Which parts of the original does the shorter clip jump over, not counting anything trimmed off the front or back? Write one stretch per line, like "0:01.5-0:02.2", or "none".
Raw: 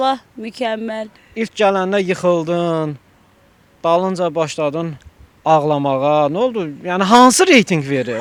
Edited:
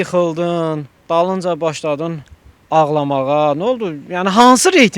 0:03.0-0:03.7

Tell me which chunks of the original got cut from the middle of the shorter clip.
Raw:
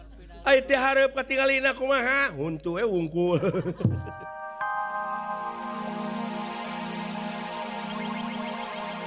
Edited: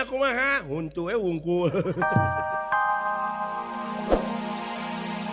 0:03.9-0:04.1

